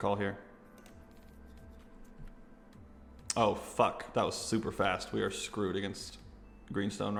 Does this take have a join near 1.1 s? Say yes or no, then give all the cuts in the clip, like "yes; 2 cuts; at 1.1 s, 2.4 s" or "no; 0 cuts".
no; 0 cuts